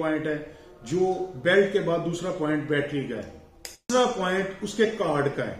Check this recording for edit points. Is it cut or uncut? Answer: cut